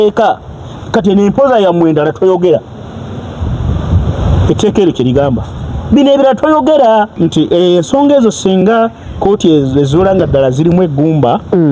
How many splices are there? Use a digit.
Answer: 1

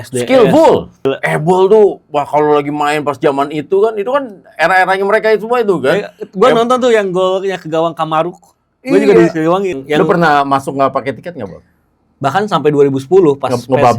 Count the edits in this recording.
2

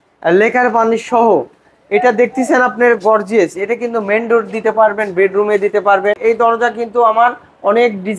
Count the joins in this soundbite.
1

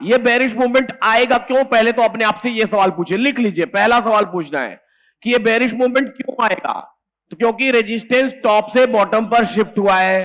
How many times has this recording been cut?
0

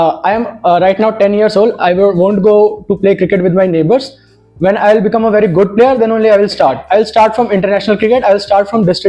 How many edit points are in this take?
0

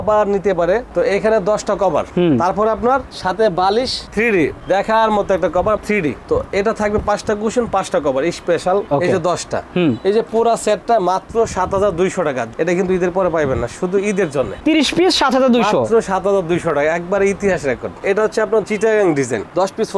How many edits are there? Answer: 5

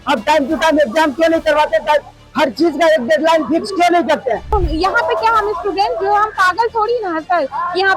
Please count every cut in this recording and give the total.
1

